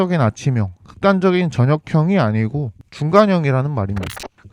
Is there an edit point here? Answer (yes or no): no